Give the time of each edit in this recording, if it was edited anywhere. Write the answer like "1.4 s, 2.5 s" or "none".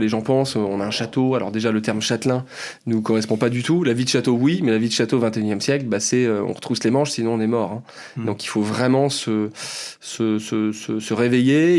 none